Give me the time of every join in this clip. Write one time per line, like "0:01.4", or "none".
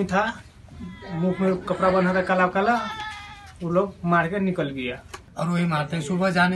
0:05.2